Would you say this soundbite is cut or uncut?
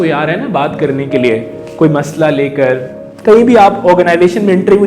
uncut